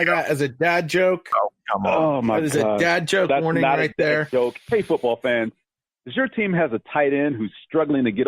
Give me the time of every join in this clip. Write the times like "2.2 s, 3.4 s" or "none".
4.6 s